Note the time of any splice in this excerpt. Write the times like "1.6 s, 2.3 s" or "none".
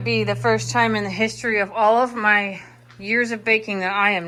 none